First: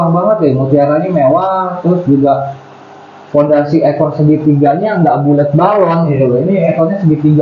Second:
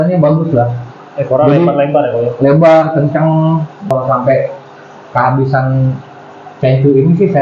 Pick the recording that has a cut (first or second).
second